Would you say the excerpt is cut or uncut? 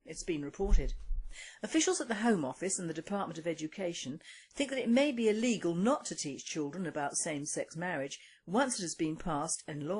uncut